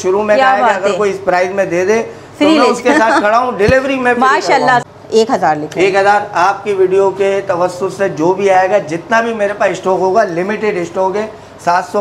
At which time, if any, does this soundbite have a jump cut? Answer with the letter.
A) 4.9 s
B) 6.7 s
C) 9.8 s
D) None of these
A